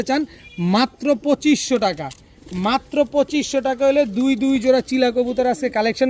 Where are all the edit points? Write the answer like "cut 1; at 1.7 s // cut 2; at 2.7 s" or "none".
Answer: none